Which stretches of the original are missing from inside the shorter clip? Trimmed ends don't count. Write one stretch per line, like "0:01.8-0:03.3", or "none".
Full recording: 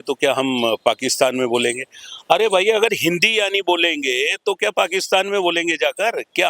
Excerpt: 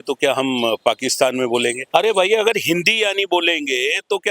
0:01.8-0:02.2

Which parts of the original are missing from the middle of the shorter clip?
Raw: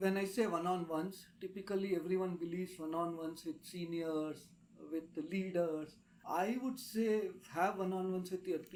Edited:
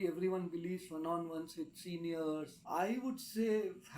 0:04.4-0:06.1

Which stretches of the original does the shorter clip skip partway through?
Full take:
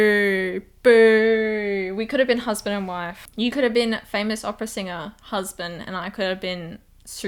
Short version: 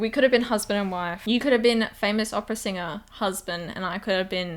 0:03.1-0:03.2

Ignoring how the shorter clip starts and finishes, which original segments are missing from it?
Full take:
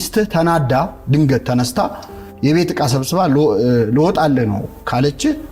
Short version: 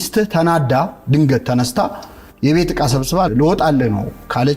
0:03.3-0:03.9

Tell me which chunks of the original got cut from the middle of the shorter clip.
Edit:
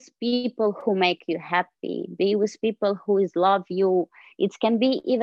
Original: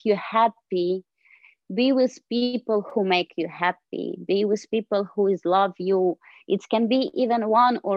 none

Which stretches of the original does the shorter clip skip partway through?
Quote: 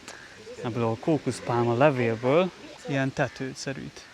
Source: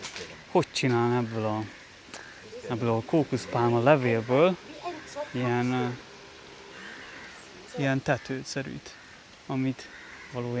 0:04.7-0:07.6

